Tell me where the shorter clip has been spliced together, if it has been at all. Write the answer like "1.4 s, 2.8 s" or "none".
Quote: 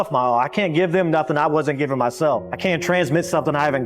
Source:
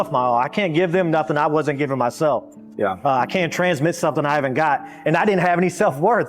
2.6 s

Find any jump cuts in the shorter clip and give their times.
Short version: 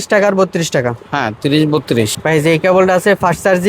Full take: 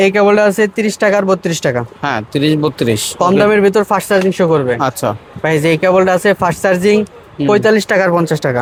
2.2 s

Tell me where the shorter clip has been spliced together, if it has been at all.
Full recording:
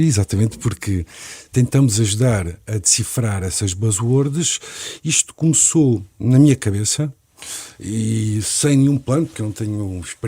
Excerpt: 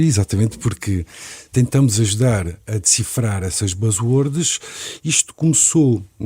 none

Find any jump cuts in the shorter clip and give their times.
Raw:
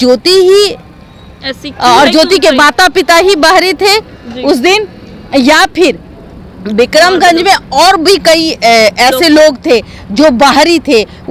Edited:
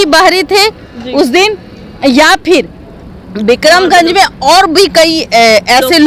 none

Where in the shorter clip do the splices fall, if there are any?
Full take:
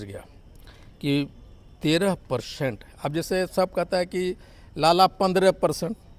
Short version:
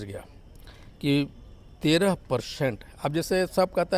none

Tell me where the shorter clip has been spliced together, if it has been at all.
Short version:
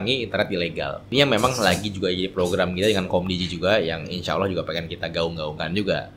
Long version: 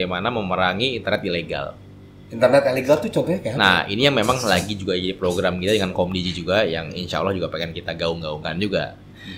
1.0 s

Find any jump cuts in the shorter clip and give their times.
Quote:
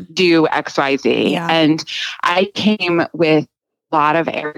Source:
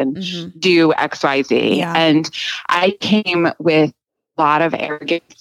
none

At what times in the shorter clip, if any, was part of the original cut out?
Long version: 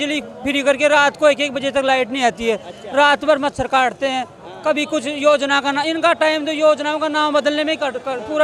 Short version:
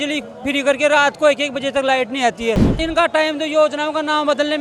2.8 s

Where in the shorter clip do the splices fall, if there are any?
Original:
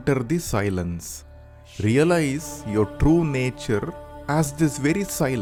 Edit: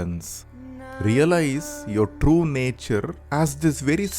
3.2 s

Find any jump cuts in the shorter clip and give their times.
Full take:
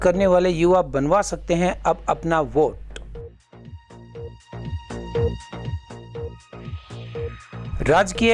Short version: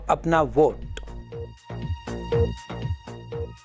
0.9 s

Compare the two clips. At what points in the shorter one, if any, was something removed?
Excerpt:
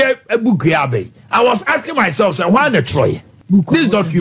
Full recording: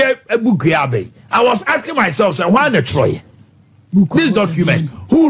3.3 s

